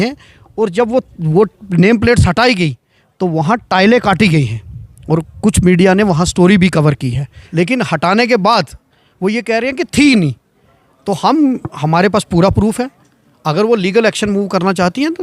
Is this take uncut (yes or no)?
no